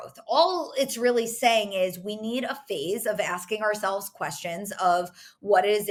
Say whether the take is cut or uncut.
uncut